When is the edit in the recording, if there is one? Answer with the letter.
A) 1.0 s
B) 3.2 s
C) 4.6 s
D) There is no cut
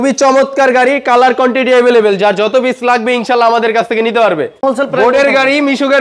C